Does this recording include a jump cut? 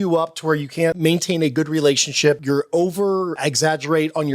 yes; 3 cuts; at 1.0 s, 2.4 s, 3.4 s

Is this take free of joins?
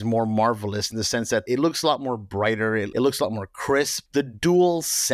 no; 3 cuts; at 1.5 s, 2.9 s, 4.0 s

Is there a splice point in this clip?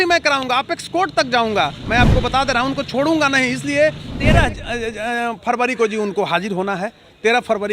yes; 1 cut; at 4.1 s

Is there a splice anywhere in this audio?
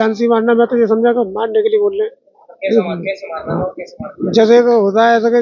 no; 0 cuts

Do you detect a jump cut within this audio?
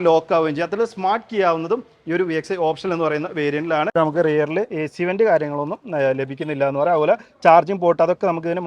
yes; 1 cut; at 3.9 s

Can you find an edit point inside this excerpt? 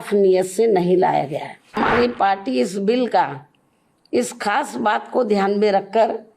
yes; 1 cut; at 1.8 s

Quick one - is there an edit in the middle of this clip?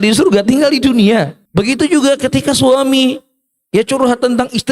yes; 1 cut; at 1.4 s

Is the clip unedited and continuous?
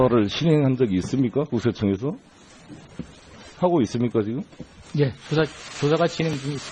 yes; 0 cuts

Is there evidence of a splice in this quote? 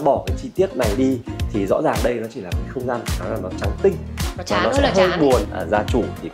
yes; 1 cut; at 5.5 s

